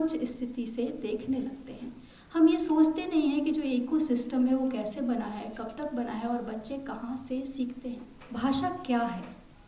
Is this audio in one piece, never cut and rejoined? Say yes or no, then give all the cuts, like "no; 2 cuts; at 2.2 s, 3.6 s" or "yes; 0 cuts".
no; 1 cut; at 8.1 s